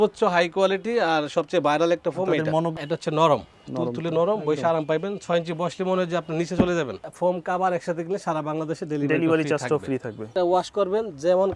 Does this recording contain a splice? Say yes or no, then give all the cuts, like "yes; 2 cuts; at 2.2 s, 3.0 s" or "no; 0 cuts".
yes; 3 cuts; at 2.7 s, 7.0 s, 10.2 s